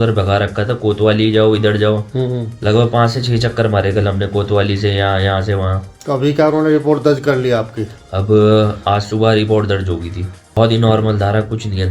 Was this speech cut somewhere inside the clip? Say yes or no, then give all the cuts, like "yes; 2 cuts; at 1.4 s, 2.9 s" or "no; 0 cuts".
yes; 1 cut; at 10.5 s